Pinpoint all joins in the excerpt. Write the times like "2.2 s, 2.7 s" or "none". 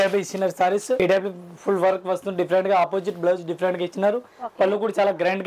1.0 s